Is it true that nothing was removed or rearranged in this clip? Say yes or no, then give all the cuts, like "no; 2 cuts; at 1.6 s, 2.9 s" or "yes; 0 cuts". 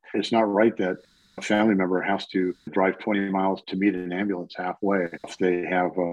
no; 1 cut; at 2.6 s